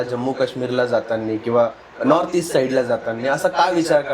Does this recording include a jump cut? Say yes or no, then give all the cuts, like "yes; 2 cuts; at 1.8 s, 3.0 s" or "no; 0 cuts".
no; 0 cuts